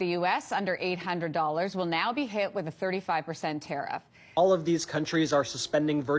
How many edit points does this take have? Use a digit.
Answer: 1